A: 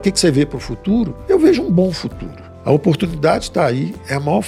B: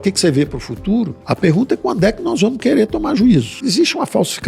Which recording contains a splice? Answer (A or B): B